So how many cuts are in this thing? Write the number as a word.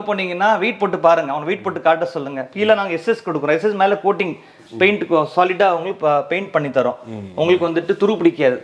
zero